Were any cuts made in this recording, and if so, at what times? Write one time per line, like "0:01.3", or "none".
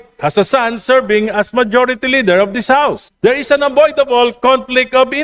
0:03.1